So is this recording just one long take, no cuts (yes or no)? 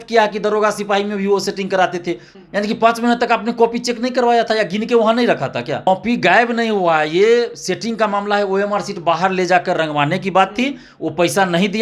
no